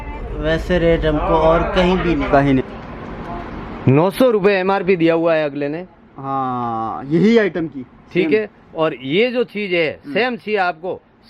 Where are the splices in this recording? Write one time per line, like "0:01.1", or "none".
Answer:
0:02.6